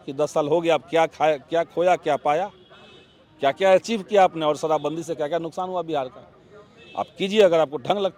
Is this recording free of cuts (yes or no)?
yes